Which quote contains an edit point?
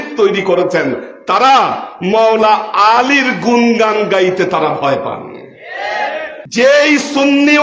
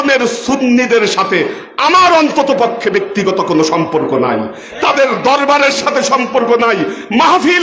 first; 1 cut; at 6.3 s

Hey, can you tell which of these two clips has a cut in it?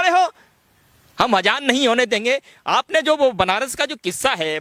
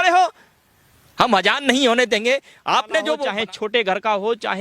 second; 1 cut; at 3.3 s

